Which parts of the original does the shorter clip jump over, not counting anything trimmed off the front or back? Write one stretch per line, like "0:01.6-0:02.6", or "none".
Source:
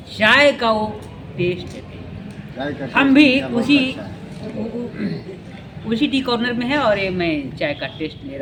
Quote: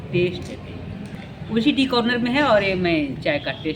0:02.4-0:05.5